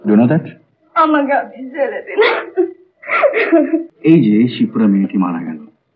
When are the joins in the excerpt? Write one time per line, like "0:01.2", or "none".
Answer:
0:03.9